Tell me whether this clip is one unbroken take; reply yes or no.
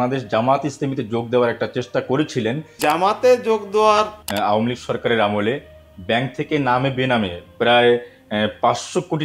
no